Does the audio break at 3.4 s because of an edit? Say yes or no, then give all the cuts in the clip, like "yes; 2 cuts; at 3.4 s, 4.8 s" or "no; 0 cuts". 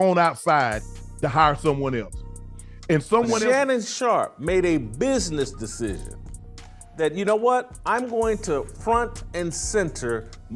yes; 1 cut; at 3.4 s